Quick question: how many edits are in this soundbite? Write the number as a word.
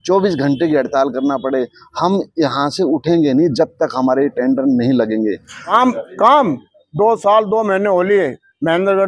one